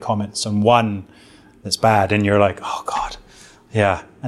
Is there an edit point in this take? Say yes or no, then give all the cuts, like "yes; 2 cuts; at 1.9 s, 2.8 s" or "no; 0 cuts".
no; 0 cuts